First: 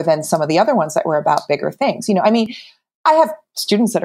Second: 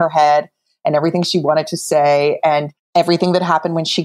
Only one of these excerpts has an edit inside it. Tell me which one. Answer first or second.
second